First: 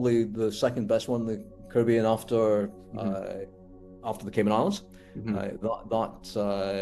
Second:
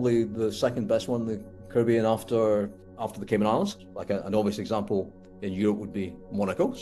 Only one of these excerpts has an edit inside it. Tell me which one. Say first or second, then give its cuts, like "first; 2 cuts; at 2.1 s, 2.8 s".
second; 2 cuts; at 2.8 s, 3.9 s